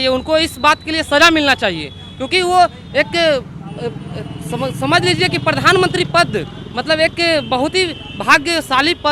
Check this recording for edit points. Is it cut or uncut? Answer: uncut